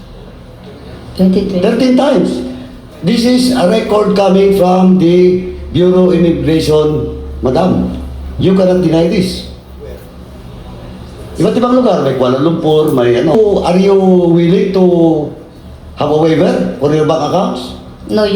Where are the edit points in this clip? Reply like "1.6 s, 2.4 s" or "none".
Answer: 13.3 s